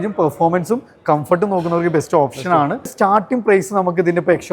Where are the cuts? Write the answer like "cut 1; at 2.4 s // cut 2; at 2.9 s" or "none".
cut 1; at 2.9 s

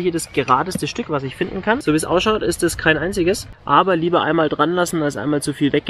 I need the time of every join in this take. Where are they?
cut 1; at 1.8 s // cut 2; at 3.5 s

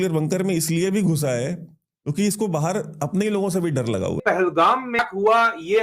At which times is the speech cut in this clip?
cut 1; at 4.2 s

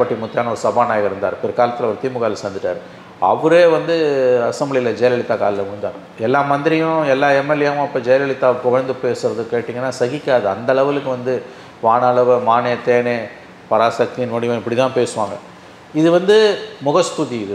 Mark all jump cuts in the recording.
none

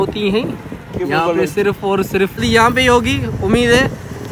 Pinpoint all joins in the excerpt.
cut 1; at 2.4 s

